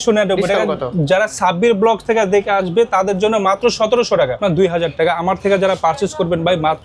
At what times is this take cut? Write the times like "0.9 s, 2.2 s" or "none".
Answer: 4.4 s